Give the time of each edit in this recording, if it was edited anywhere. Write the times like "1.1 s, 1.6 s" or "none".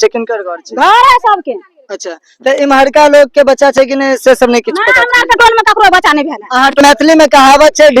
6.8 s

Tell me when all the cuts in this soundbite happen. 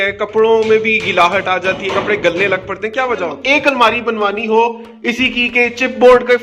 3.4 s

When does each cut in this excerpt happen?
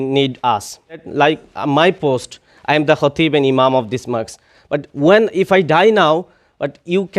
1.1 s

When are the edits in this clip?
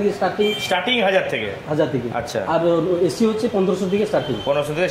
none

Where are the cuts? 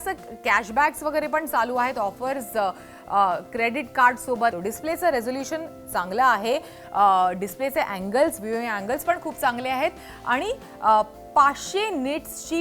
4.5 s

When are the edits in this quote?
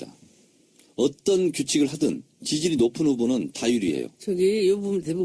3.1 s

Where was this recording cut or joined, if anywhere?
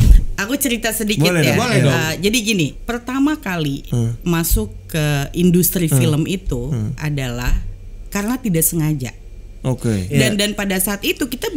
2.8 s, 10.1 s

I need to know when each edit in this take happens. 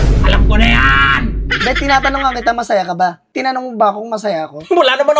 3.2 s

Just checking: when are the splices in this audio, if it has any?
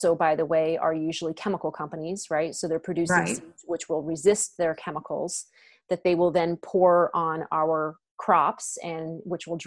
none

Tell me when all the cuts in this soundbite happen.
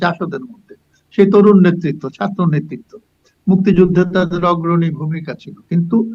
none

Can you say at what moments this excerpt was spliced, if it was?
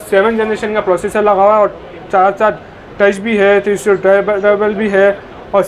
none

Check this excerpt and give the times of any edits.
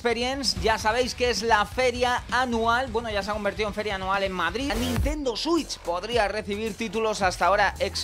4.7 s

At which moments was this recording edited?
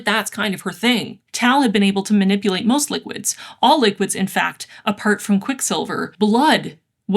1.2 s, 6.1 s

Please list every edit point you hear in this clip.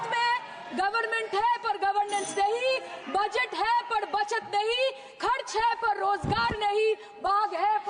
none

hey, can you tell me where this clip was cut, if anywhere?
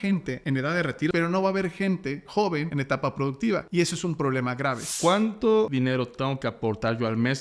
0.8 s, 2.7 s, 3.7 s, 4.9 s, 5.7 s

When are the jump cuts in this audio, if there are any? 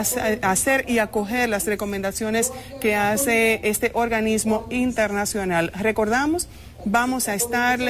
4.9 s

